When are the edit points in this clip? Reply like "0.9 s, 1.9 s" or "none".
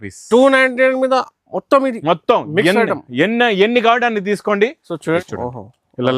5.2 s

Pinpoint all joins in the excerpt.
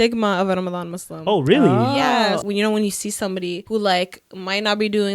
2.4 s, 3.6 s

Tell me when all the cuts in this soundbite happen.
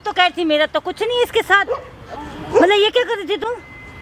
none

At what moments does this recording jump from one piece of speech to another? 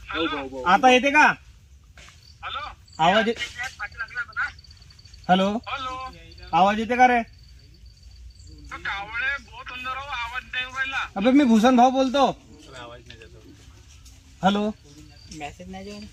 none

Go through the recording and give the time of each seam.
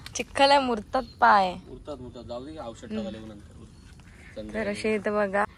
none

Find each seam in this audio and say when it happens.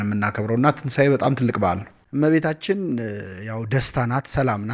1.9 s

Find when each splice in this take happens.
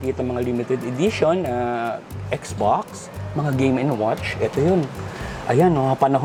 none

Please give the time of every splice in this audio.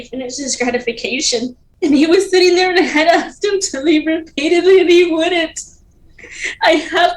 1.6 s

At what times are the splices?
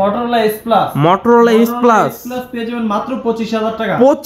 none

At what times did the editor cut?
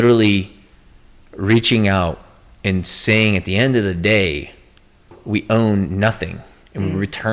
5.2 s

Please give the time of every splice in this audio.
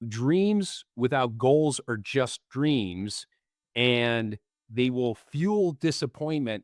none

